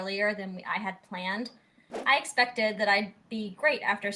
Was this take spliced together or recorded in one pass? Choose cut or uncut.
cut